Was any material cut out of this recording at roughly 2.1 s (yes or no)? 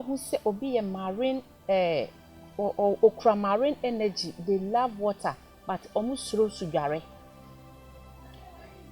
no